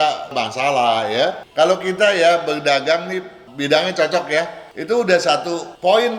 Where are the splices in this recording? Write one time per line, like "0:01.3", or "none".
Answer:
0:01.4